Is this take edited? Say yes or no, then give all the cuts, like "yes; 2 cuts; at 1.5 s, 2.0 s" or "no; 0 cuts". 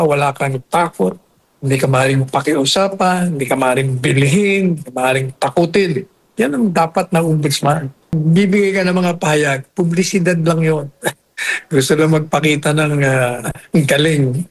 yes; 1 cut; at 8.2 s